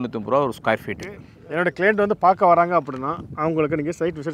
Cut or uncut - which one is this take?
cut